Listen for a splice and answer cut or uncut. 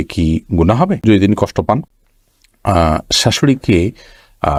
uncut